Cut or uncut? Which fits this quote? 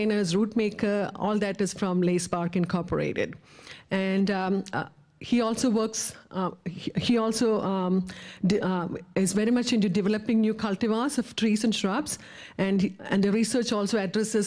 uncut